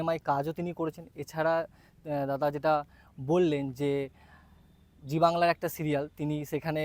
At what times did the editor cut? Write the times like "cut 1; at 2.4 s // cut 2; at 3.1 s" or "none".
none